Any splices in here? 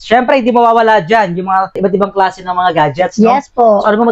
yes; 1 cut; at 1.8 s

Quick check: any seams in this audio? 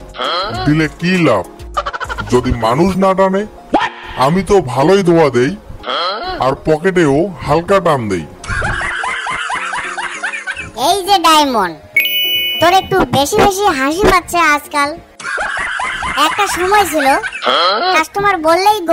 no; 0 cuts

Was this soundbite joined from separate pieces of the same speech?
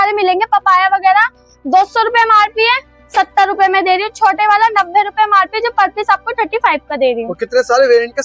no; 0 cuts

